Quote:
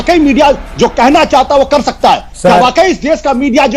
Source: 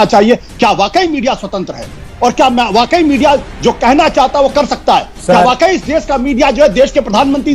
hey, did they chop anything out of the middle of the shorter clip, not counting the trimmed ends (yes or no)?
no